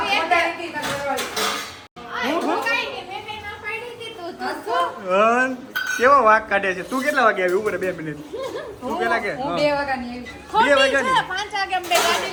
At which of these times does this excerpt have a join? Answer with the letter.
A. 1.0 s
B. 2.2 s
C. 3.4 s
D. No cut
D